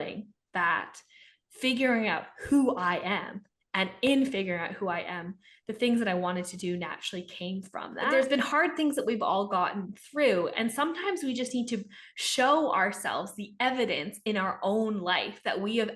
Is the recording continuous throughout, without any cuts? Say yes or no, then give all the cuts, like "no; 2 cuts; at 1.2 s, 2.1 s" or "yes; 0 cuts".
no; 1 cut; at 8.1 s